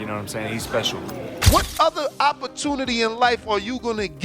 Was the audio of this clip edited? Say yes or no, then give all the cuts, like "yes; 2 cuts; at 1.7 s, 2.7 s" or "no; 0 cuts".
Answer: yes; 1 cut; at 1.4 s